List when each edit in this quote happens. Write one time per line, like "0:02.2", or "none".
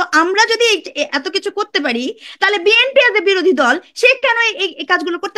none